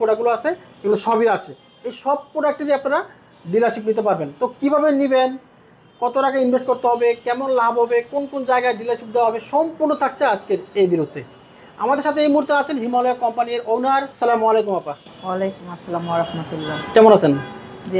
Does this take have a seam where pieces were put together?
no; 0 cuts

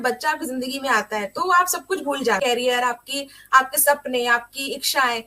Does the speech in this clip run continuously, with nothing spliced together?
no; 1 cut; at 2.5 s

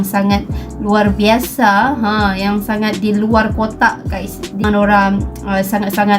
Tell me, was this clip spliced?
yes; 1 cut; at 4.6 s

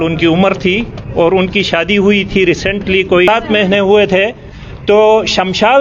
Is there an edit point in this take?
yes; 1 cut; at 3.3 s

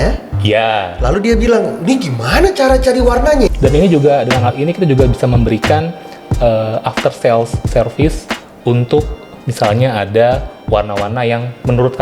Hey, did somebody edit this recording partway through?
yes; 1 cut; at 3.5 s

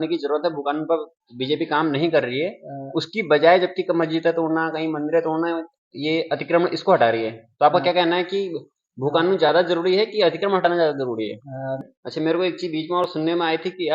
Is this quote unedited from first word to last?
no; 1 cut; at 11.8 s

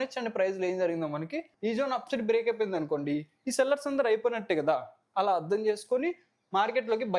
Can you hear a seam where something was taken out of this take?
yes; 1 cut; at 1.5 s

